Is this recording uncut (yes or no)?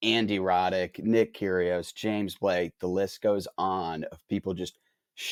yes